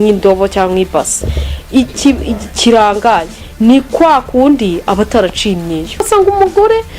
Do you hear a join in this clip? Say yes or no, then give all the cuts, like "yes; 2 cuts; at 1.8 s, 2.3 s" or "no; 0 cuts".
yes; 1 cut; at 6.1 s